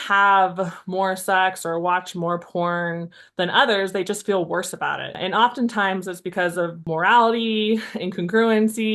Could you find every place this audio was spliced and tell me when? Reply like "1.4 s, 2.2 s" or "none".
5.2 s, 6.8 s

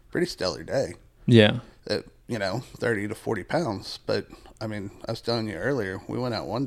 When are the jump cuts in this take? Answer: none

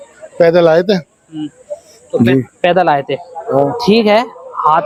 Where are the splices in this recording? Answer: none

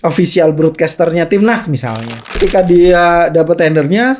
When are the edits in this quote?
2.4 s

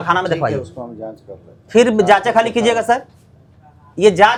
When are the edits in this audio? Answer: none

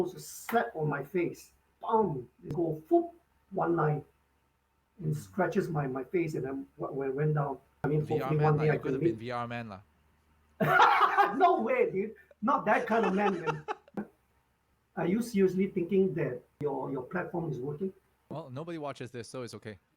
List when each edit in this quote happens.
2.5 s, 7.7 s, 14.0 s, 16.6 s, 18.3 s

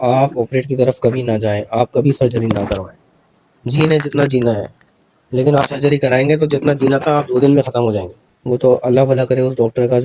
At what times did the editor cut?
8.2 s

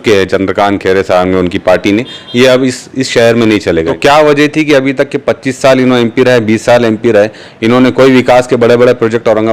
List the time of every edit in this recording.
3.9 s

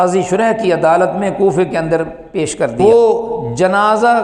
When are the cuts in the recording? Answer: 2.8 s

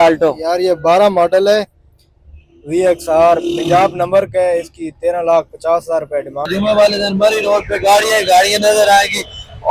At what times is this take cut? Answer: 6.4 s

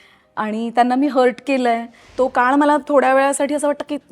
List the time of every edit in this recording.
2.0 s

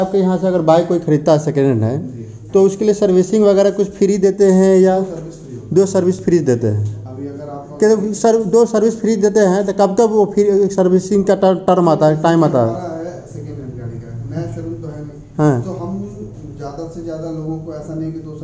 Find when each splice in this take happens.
none

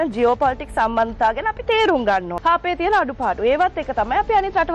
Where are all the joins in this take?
2.3 s

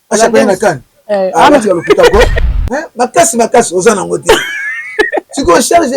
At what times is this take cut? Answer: 2.4 s

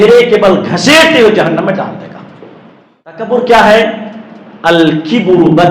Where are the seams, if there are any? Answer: 3.3 s

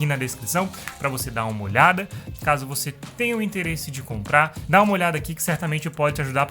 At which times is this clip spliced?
4.6 s

